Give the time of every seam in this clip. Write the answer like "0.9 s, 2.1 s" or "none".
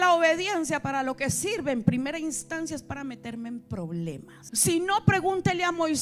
4.3 s